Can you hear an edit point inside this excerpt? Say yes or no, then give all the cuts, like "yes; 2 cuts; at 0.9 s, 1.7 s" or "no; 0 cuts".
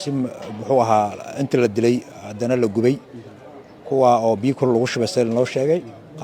no; 0 cuts